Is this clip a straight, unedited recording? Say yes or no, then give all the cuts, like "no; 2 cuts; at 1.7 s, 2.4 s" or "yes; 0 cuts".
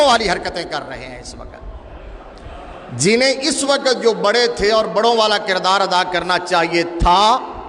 yes; 0 cuts